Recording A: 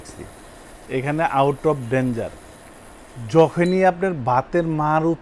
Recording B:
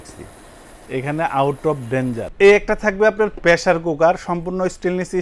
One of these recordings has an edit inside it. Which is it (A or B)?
B